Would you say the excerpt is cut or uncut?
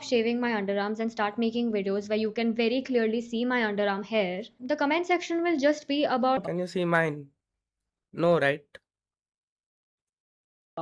uncut